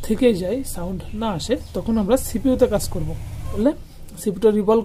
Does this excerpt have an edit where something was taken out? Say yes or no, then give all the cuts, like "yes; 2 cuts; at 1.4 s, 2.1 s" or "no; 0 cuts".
yes; 1 cut; at 3.6 s